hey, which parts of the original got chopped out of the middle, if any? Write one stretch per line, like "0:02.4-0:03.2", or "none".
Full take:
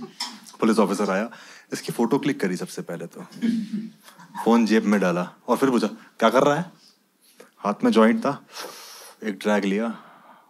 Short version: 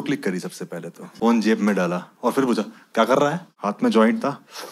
0:03.2-0:04.2
0:06.7-0:07.5